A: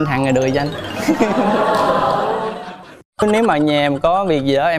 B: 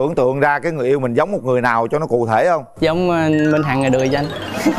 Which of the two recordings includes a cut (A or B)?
A